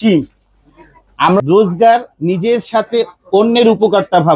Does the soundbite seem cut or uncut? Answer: cut